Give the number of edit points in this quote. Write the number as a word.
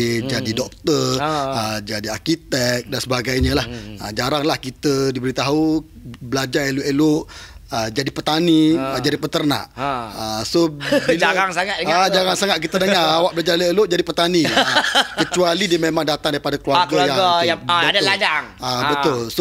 zero